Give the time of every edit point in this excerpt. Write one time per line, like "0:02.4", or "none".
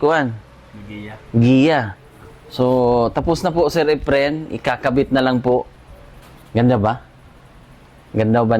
0:05.8